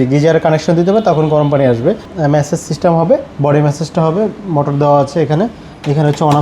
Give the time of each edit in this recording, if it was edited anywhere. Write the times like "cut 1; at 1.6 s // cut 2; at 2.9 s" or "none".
cut 1; at 2.1 s